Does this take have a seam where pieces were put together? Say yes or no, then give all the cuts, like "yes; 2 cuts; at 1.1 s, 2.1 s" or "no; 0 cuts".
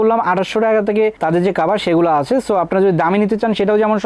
no; 0 cuts